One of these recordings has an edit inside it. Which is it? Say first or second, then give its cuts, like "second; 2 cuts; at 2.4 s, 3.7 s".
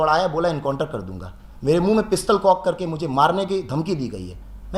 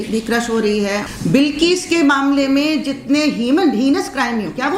second; 1 cut; at 1.1 s